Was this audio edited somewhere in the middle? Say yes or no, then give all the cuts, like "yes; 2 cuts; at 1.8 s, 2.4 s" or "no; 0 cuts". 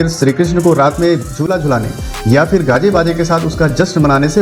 no; 0 cuts